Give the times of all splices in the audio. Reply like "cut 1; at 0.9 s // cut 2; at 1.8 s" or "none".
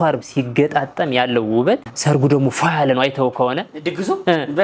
cut 1; at 1.9 s